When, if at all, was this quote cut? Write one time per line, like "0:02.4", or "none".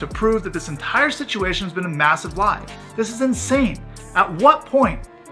none

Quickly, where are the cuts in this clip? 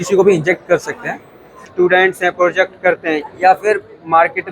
0:01.7

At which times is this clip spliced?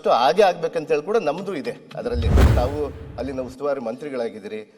0:02.5

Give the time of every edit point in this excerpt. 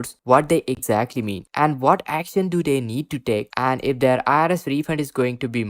none

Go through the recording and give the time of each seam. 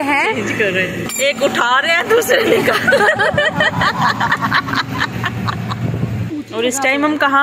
0:01.1
0:06.2

